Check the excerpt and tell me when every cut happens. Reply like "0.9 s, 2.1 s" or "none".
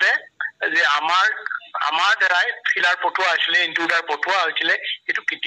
none